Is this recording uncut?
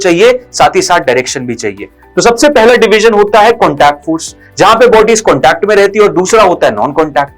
no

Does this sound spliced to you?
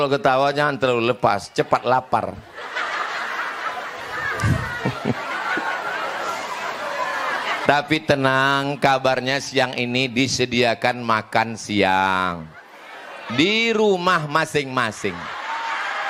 no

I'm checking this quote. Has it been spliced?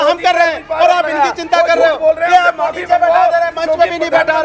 no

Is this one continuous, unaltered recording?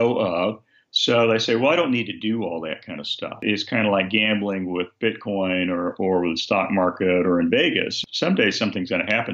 no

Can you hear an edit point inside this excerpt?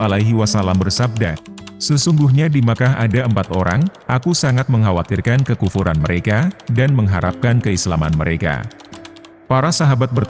yes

